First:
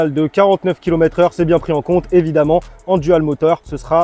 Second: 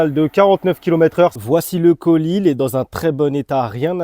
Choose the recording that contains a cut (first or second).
second